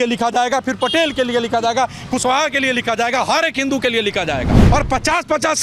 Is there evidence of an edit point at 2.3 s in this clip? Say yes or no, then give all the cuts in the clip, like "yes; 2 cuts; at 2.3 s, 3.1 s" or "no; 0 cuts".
no; 1 cut; at 4.6 s